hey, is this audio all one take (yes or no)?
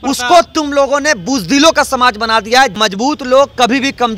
no